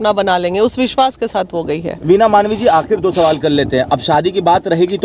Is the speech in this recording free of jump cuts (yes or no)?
yes